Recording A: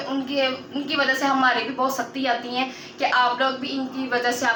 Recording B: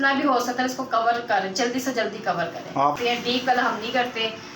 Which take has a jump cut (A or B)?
B